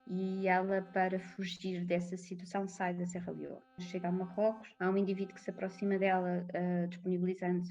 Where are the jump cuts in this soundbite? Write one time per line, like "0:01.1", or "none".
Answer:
0:03.8
0:04.7